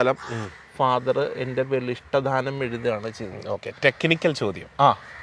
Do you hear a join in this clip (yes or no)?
no